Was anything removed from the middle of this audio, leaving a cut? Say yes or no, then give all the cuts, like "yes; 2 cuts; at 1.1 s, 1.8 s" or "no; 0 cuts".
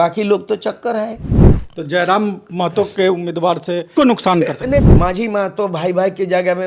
yes; 2 cuts; at 3.9 s, 4.9 s